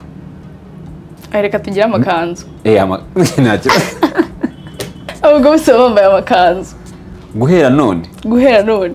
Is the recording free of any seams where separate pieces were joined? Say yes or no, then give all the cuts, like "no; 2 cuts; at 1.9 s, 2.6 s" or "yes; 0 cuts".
no; 1 cut; at 5.1 s